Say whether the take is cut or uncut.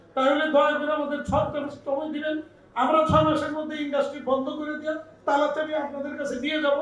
uncut